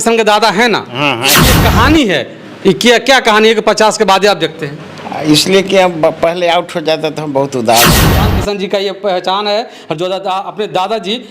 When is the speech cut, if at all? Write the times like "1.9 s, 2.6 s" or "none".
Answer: 1.5 s, 8.1 s